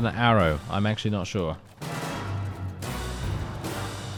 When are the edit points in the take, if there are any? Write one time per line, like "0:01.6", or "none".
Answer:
none